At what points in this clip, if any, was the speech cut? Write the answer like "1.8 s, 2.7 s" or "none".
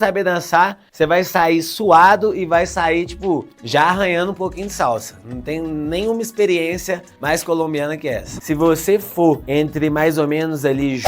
8.3 s